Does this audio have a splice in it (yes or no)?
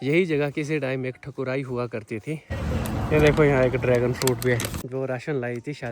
yes